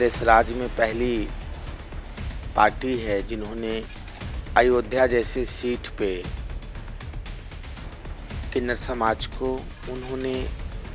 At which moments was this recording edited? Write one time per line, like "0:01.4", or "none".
none